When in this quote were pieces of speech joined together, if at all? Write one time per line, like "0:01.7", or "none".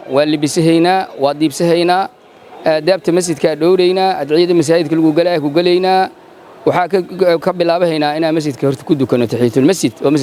none